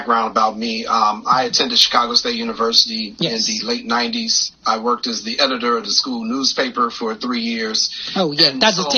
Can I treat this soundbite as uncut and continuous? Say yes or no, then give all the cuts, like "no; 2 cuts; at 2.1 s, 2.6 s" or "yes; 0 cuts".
yes; 0 cuts